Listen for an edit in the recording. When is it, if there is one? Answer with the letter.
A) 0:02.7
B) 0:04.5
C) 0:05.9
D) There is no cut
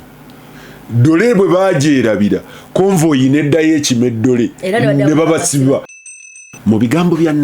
C